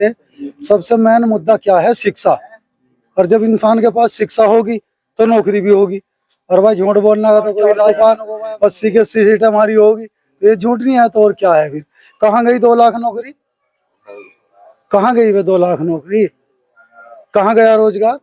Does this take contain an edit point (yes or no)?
yes